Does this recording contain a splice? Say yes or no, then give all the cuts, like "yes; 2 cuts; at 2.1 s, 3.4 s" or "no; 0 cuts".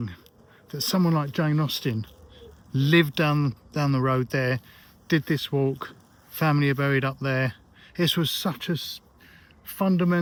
no; 0 cuts